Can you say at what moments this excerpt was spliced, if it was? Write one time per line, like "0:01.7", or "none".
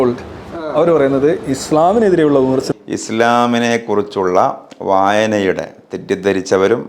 0:02.7

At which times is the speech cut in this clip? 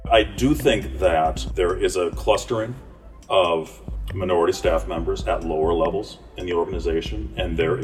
0:01.4

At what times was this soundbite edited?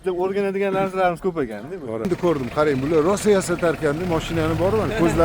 0:02.1

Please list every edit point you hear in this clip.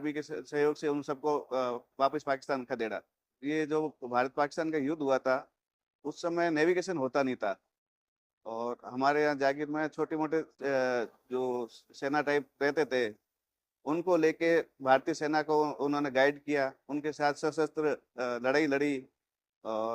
0:03.3

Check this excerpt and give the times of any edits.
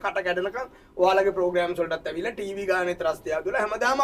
none

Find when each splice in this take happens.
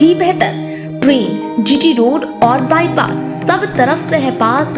none

